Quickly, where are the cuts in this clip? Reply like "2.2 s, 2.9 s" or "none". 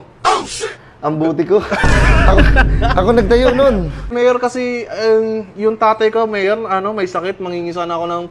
4.1 s